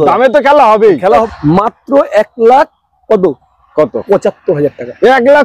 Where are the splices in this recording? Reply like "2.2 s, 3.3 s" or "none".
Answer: 1.2 s

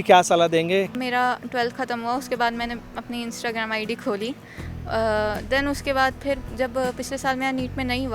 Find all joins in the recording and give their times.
0.9 s

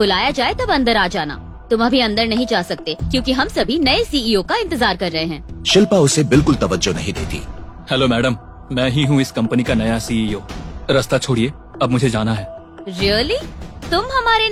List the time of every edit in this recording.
none

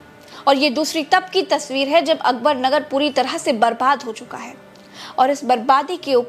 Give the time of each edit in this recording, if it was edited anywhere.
none

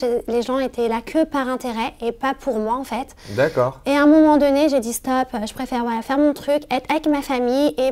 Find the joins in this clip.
none

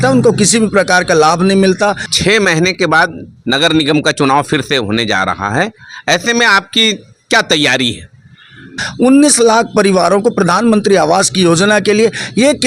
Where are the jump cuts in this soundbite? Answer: 2.1 s, 8.8 s

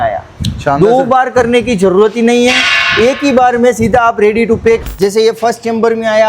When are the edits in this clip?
4.8 s

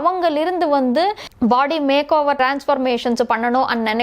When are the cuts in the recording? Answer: 1.2 s

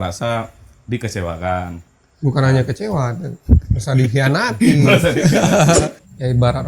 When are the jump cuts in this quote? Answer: 5.8 s

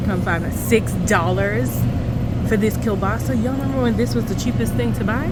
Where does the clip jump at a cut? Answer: none

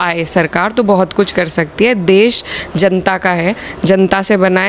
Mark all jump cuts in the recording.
none

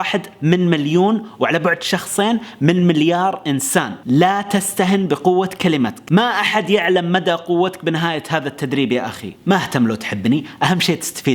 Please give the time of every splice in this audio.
6.0 s, 9.2 s

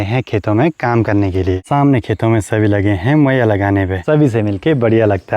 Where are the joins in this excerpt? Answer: 1.6 s, 4.0 s

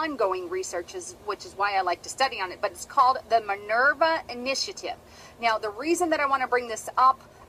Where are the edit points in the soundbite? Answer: 5.8 s

